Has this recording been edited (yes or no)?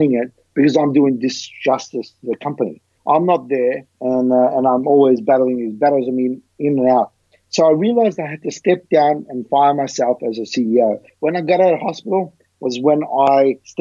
yes